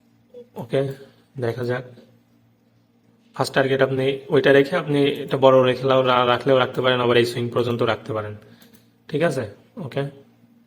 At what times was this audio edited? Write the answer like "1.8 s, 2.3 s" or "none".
none